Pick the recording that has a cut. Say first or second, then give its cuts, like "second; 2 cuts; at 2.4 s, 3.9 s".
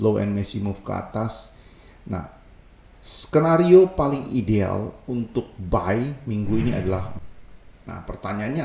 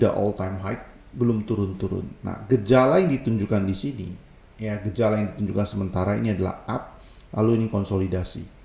first; 1 cut; at 7.1 s